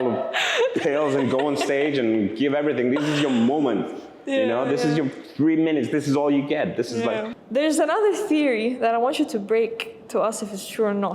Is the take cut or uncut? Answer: cut